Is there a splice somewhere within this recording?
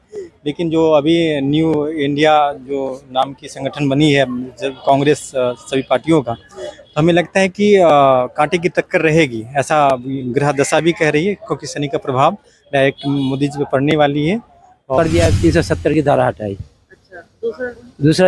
yes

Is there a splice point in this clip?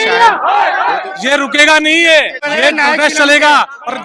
yes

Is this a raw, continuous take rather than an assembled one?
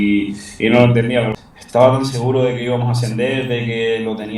no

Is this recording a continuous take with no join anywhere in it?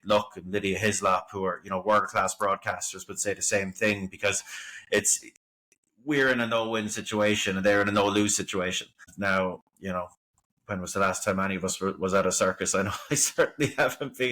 no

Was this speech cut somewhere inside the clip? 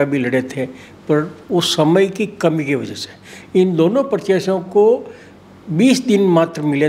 no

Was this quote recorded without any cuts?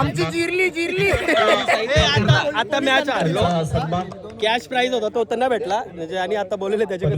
yes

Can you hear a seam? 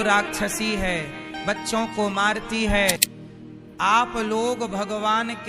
yes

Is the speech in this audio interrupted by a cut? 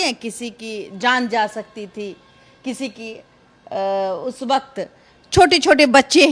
no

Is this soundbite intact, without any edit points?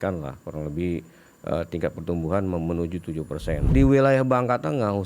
no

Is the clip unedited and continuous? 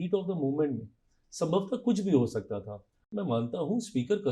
no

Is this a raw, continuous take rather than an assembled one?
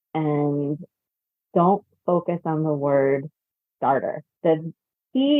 no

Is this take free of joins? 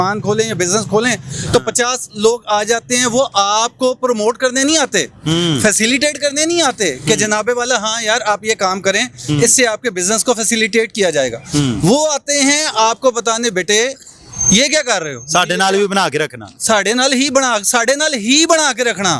yes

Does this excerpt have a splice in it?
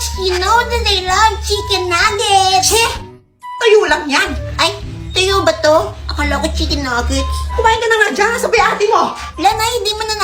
no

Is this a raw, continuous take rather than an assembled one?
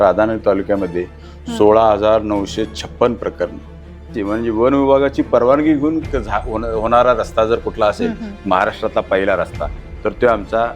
no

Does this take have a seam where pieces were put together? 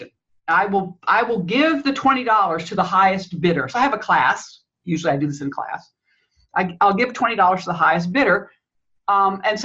no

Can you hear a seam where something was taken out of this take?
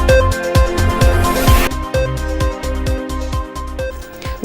yes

